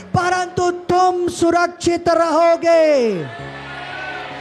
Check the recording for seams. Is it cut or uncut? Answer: uncut